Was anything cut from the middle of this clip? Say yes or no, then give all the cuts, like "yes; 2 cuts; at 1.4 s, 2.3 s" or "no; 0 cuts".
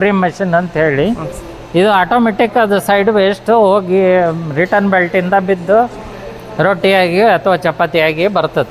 no; 0 cuts